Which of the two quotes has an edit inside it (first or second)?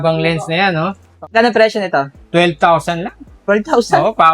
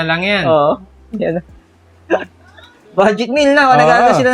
first